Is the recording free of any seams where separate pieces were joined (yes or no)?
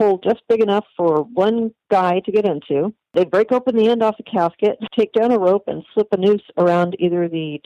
no